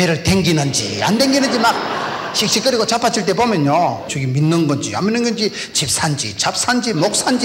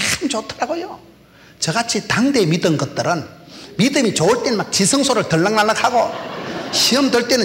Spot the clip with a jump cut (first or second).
first